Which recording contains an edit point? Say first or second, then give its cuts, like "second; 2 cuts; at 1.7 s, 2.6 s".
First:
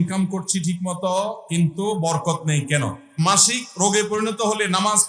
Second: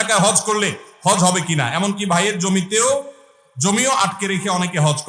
first; 1 cut; at 3.0 s